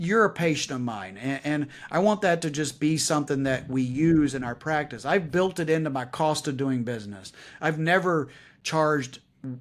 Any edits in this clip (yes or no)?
no